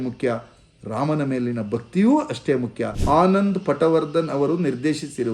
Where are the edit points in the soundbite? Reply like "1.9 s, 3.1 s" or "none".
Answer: 2.9 s